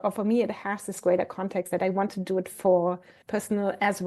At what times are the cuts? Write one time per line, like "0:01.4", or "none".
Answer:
0:03.1